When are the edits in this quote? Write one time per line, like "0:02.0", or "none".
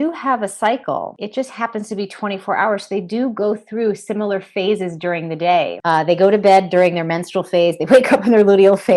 0:01.2
0:05.8